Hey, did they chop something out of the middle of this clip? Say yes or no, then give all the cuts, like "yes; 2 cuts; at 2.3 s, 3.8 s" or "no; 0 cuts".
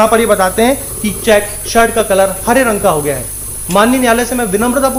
no; 0 cuts